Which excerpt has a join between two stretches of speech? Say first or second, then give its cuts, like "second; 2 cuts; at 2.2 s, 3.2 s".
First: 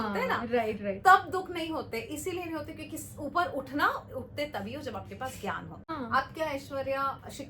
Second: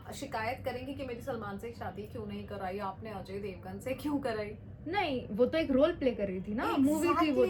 first; 1 cut; at 5.9 s